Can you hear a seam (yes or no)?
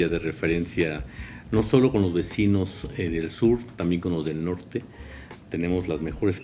no